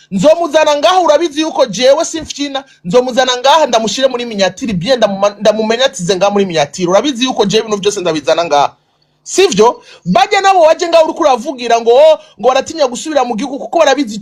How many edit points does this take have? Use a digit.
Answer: 0